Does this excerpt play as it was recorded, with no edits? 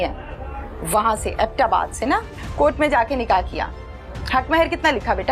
no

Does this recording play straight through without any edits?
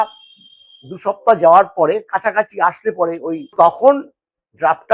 no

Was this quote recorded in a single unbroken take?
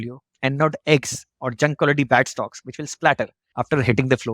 no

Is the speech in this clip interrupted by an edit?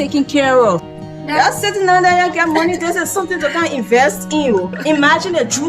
yes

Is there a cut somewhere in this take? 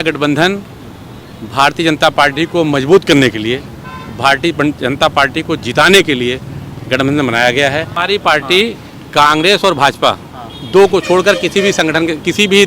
yes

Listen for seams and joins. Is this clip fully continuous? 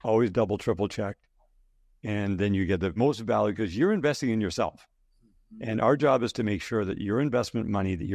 no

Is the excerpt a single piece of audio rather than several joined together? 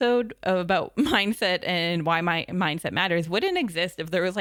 yes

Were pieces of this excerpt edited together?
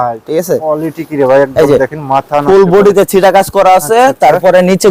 no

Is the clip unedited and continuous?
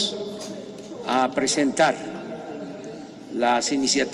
yes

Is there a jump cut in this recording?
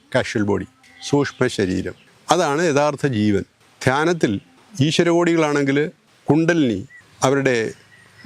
yes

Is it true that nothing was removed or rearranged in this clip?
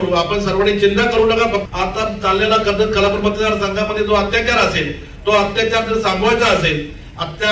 no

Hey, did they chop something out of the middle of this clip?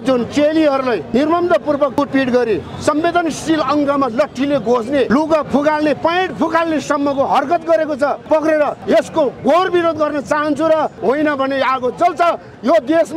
yes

